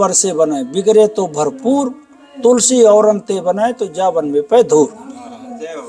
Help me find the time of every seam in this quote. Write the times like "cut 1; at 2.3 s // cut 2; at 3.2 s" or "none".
none